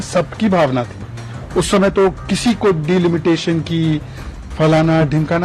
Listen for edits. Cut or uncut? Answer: uncut